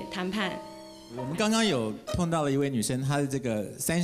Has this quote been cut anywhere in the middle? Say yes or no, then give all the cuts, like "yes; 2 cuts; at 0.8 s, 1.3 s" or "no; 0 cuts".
yes; 1 cut; at 1.2 s